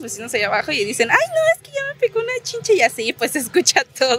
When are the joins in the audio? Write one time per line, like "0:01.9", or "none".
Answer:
none

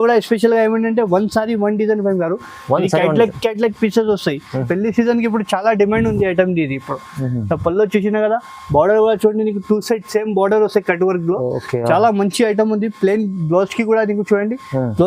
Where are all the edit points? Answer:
0:04.6

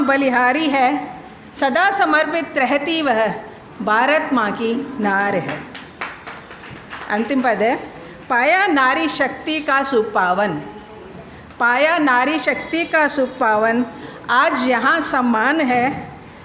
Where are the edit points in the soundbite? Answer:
none

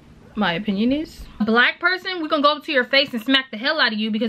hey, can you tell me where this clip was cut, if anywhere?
0:01.4

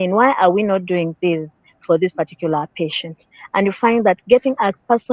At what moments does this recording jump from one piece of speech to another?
none

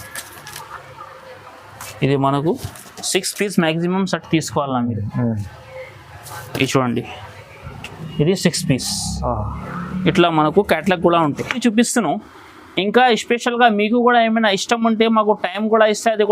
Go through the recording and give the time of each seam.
0:11.6

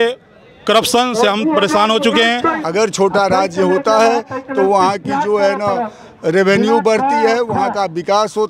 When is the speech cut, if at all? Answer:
0:02.6

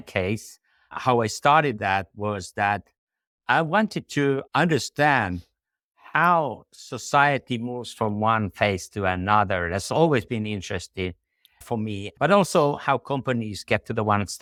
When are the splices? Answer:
none

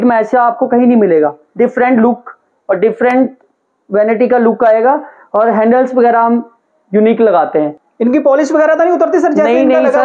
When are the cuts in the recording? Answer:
none

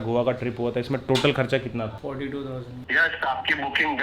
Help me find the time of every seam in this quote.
0:02.8

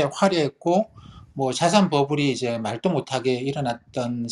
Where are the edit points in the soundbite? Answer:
none

